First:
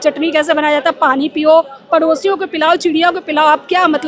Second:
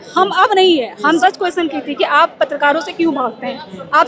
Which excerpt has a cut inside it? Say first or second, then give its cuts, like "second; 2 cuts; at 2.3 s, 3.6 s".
second; 1 cut; at 1.2 s